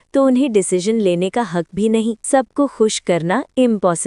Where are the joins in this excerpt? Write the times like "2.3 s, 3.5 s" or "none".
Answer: 2.2 s

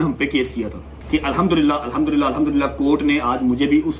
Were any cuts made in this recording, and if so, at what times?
0.9 s

